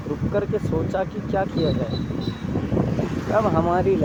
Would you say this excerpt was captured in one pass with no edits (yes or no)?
yes